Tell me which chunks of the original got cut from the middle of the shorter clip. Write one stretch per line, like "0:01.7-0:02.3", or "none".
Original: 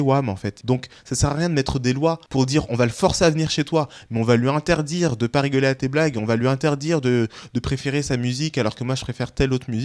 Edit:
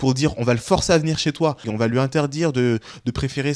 0:04.0-0:06.2